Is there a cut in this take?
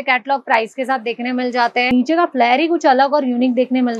yes; 1 cut; at 1.9 s

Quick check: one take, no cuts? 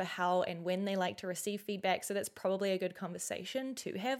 yes; 0 cuts

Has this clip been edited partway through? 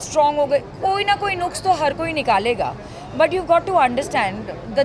no; 0 cuts

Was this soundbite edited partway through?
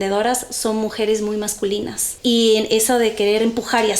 yes; 1 cut; at 2.0 s

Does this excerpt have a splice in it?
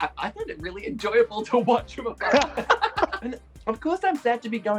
yes; 1 cut; at 3.3 s

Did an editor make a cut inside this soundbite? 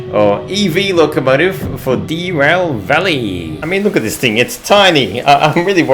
yes; 1 cut; at 3.5 s

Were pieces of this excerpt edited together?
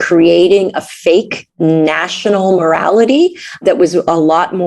yes; 2 cuts; at 1.4 s, 3.6 s

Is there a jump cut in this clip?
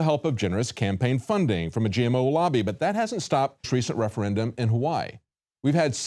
no; 0 cuts

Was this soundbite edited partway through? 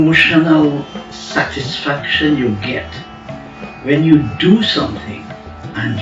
no; 0 cuts

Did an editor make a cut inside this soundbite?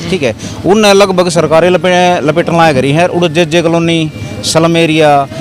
no; 0 cuts

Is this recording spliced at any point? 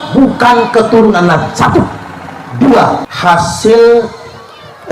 yes; 1 cut; at 3.1 s

